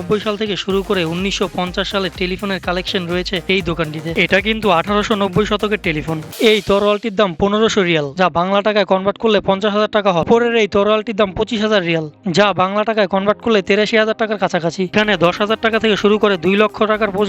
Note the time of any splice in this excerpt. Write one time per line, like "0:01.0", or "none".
0:04.1
0:06.2
0:10.3
0:14.9